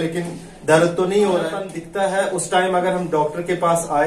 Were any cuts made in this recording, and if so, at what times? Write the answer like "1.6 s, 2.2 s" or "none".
1.8 s